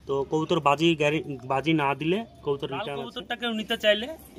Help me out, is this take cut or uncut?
cut